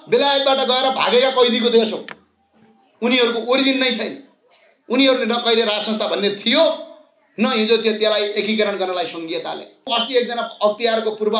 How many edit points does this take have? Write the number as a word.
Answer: one